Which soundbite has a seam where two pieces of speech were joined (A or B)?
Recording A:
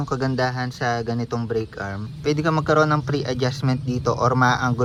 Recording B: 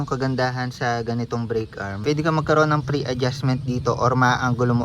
B